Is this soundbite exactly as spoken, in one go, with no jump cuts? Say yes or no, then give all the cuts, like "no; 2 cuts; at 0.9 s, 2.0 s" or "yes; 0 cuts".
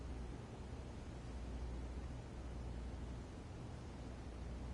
yes; 0 cuts